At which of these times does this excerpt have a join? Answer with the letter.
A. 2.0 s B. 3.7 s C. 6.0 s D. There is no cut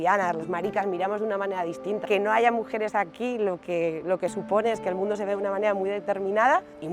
A